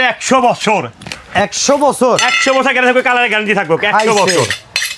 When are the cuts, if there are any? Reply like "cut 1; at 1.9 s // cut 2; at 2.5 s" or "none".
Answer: none